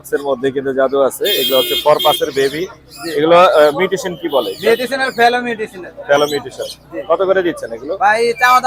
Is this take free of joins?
yes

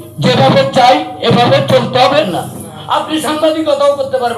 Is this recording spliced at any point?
yes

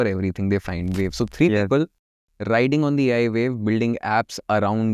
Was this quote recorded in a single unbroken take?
no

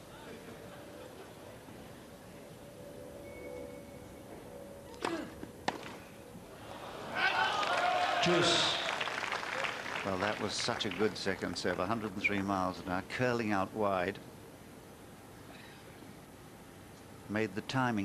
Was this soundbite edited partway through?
yes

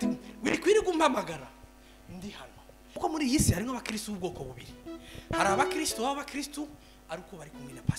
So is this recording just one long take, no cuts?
no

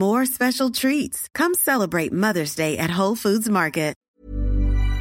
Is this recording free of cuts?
no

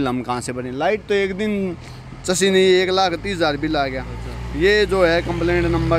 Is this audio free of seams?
yes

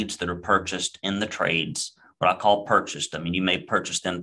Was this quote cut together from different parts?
no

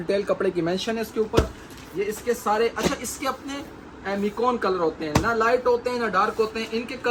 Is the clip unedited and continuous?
yes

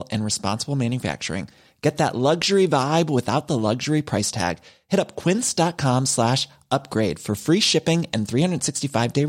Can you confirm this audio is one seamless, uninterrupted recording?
yes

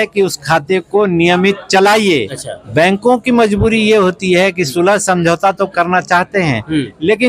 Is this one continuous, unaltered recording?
no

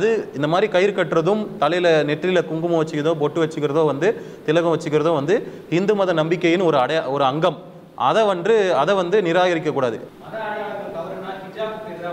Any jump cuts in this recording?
yes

